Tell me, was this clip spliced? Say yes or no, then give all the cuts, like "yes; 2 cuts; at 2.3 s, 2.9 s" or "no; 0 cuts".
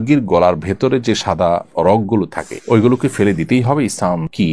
no; 0 cuts